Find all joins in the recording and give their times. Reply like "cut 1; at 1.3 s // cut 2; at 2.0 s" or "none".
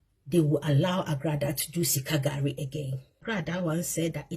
cut 1; at 3.2 s